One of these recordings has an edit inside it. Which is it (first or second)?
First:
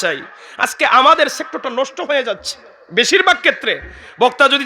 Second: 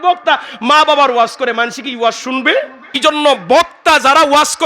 second